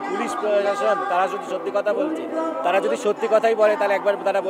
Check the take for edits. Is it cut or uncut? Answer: uncut